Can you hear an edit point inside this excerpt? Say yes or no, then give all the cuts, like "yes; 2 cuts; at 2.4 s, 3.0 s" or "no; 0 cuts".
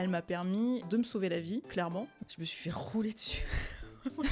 yes; 2 cuts; at 0.8 s, 1.8 s